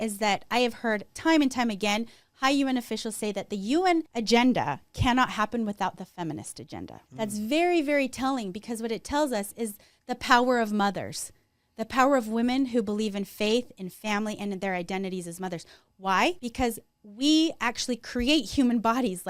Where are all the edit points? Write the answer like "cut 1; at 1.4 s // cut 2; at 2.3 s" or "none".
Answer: cut 1; at 1.1 s // cut 2; at 4.1 s // cut 3; at 7.0 s // cut 4; at 16.4 s